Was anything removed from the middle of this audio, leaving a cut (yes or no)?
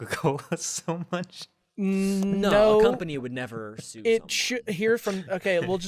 no